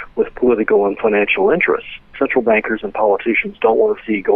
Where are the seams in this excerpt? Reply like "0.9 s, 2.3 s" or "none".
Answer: 2.1 s